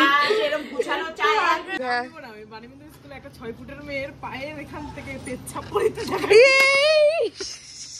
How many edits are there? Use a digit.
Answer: 2